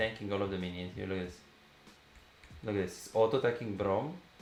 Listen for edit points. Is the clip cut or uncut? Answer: uncut